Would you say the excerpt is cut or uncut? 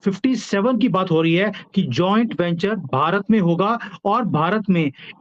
uncut